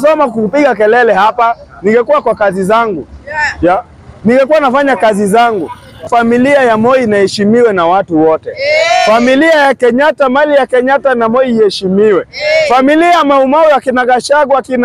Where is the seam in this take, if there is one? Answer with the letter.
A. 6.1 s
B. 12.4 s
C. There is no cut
A